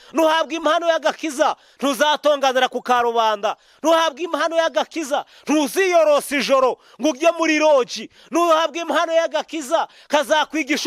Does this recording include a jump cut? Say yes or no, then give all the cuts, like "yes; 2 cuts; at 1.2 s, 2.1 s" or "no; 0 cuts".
no; 0 cuts